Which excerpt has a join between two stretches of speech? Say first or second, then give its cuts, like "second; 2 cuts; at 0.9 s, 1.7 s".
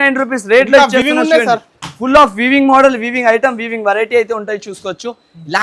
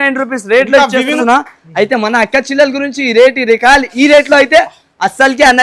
second; 1 cut; at 1.1 s